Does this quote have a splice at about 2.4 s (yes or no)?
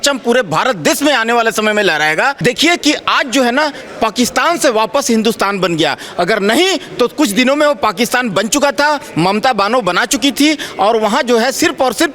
yes